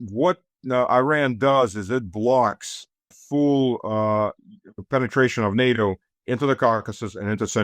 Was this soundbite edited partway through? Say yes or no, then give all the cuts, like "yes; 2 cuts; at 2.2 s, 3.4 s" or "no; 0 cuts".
yes; 1 cut; at 3.2 s